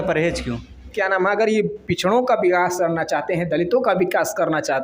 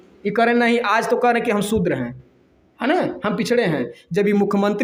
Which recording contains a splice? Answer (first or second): first